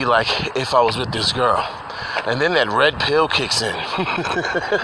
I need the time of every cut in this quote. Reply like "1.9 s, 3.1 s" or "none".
none